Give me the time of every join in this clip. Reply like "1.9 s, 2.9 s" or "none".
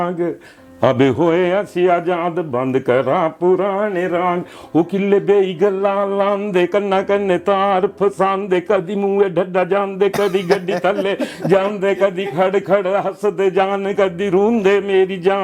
none